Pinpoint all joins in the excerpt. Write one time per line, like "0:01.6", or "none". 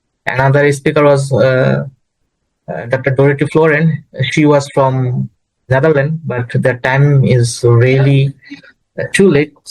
none